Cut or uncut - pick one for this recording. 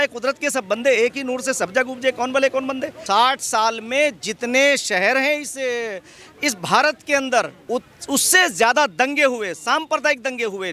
cut